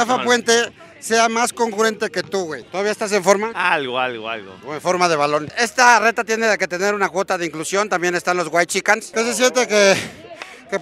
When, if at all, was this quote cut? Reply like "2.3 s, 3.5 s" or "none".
2.6 s, 5.3 s, 9.1 s